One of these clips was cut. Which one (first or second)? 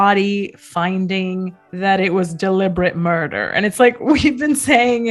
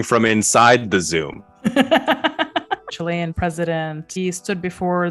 second